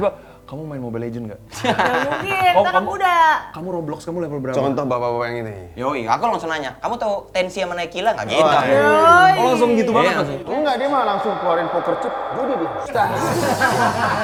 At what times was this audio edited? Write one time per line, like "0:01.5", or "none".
none